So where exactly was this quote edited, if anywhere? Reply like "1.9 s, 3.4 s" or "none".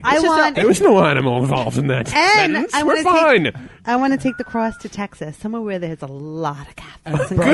none